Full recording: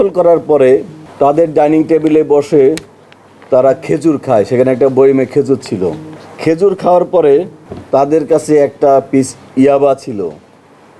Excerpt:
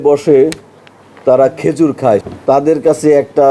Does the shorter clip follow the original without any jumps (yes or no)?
no